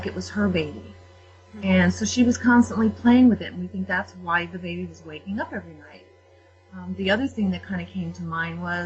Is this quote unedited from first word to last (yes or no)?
yes